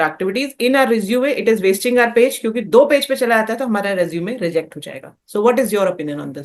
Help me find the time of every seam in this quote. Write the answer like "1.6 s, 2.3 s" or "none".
none